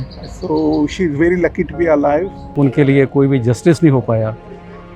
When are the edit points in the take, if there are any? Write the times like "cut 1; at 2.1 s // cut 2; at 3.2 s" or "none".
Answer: cut 1; at 2.5 s